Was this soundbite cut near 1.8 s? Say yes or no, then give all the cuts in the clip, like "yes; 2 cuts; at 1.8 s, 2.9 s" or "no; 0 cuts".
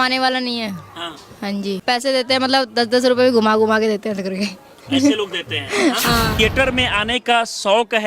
yes; 2 cuts; at 1.8 s, 6.4 s